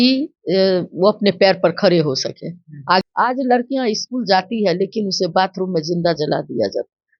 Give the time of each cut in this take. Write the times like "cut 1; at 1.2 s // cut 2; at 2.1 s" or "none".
cut 1; at 3.0 s